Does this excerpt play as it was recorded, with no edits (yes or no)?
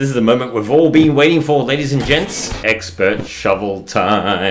no